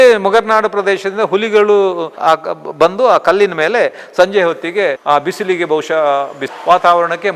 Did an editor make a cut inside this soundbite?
yes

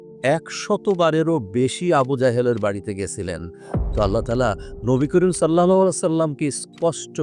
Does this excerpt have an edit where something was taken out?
yes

